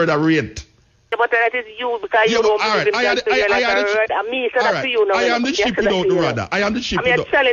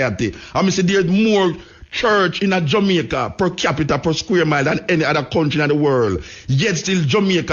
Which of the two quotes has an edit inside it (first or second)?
first